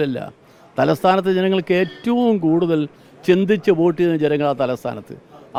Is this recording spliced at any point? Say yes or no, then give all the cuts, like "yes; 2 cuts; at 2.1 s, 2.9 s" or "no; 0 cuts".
no; 0 cuts